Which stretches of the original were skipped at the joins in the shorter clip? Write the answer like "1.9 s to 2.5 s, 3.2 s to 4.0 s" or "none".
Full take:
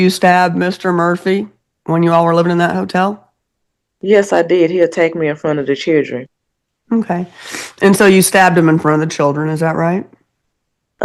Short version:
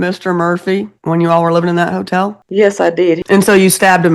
1.5 s to 1.8 s, 3.2 s to 3.9 s, 4.7 s to 7.7 s